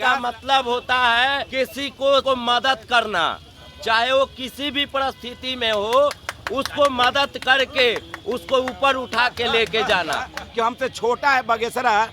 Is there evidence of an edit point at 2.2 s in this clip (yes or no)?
yes